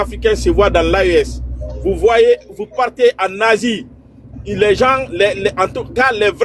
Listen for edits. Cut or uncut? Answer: uncut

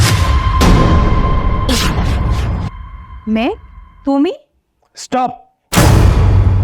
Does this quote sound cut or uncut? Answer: cut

